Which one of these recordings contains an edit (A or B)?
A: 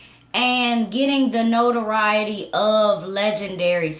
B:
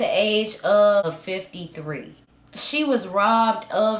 B